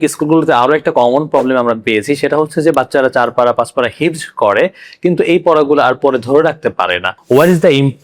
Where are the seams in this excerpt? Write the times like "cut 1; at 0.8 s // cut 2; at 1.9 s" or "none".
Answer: cut 1; at 7.1 s